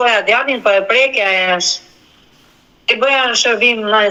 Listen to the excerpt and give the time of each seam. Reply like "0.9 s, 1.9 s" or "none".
none